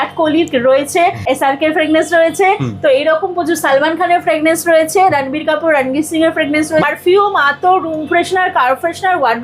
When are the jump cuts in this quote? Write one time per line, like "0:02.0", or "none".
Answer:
0:01.2
0:06.8